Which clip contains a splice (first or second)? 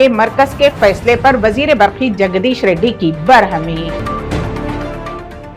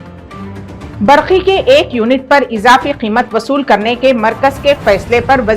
second